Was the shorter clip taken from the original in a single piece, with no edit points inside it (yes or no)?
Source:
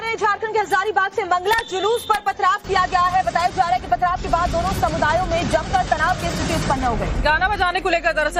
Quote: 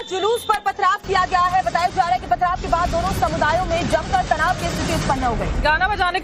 yes